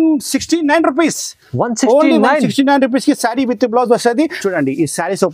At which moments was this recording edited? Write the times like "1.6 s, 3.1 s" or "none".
4.4 s